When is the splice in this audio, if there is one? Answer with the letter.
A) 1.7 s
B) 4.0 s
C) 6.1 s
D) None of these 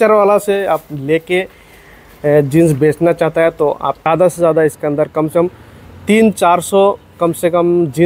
B